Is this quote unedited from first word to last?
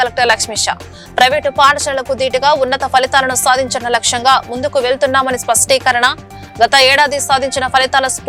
yes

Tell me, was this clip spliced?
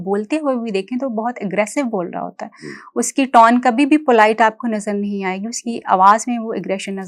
no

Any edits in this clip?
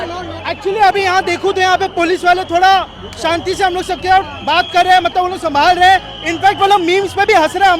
no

